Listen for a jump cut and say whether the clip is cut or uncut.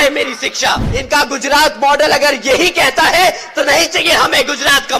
cut